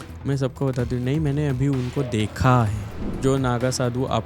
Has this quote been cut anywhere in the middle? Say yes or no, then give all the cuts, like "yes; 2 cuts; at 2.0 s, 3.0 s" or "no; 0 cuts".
yes; 1 cut; at 3.0 s